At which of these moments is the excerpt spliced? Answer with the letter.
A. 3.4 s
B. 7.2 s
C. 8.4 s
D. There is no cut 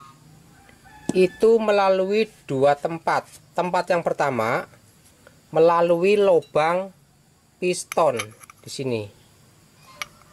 D